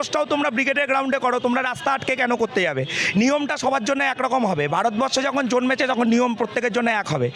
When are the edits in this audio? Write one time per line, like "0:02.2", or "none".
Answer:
none